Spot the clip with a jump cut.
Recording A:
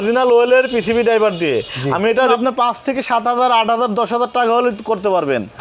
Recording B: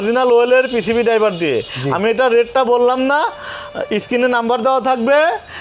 A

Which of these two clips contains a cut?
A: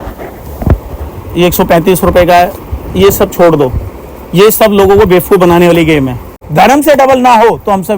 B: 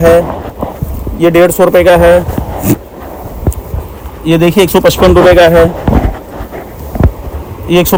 A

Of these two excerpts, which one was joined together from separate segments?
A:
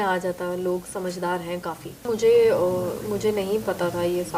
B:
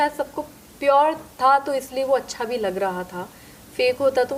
A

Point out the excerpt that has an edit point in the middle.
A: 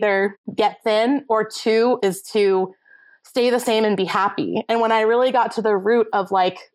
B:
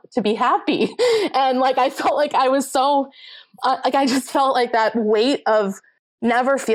A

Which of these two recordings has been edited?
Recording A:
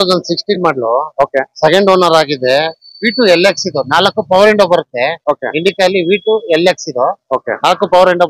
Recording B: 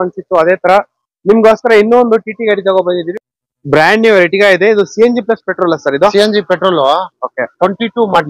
B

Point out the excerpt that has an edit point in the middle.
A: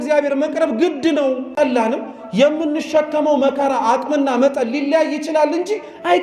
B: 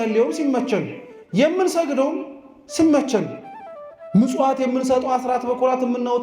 A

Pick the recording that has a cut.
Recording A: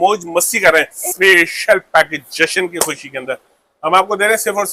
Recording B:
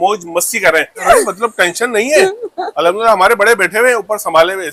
A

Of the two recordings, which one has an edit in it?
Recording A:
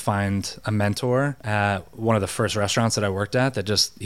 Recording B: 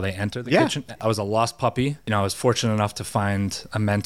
B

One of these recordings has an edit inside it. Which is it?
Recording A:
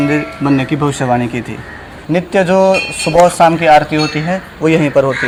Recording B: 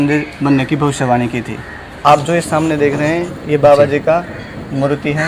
B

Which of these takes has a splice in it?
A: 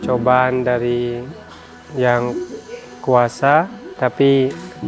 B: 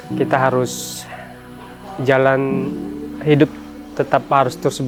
A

